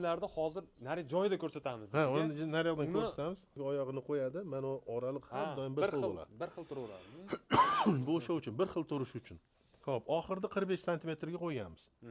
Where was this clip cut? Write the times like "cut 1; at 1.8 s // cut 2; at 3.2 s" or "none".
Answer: cut 1; at 3.6 s